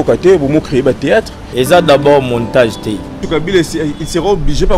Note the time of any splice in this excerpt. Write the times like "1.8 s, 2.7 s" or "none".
1.4 s, 3.2 s